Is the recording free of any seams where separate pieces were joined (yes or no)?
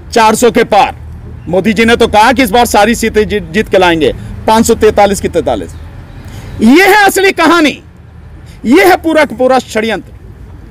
yes